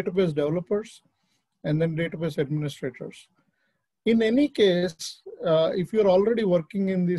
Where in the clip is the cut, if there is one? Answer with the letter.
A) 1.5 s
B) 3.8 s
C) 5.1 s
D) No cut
D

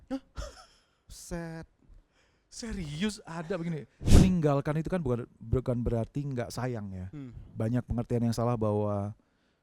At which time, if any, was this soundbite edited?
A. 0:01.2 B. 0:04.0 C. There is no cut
B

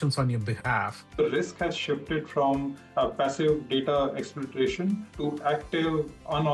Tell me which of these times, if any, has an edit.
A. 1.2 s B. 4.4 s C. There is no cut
A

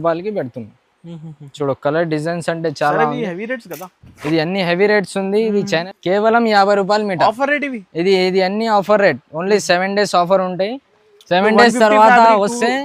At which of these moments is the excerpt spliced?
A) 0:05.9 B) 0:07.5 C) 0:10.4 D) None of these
A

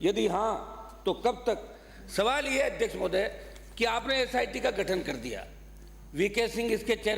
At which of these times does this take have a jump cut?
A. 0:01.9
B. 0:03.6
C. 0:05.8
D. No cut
A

